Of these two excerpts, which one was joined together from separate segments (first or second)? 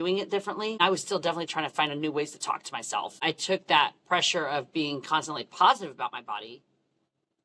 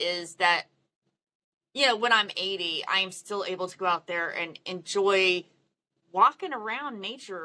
first